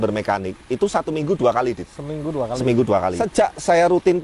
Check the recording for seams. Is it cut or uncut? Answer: cut